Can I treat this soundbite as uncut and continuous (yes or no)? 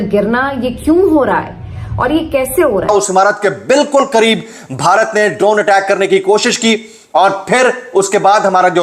no